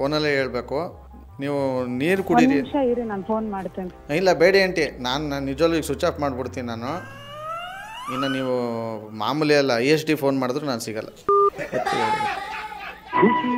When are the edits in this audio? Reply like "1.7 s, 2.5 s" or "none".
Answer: none